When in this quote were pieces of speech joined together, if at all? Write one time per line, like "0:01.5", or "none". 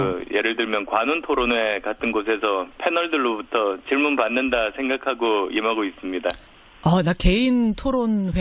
none